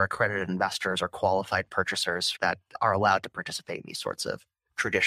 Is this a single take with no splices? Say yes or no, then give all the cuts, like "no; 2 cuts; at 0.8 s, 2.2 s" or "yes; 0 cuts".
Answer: no; 1 cut; at 2.3 s